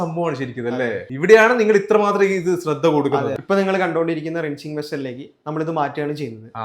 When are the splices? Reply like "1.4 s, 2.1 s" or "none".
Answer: 1.1 s, 3.4 s